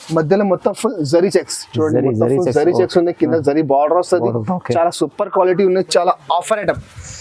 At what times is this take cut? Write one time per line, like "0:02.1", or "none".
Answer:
none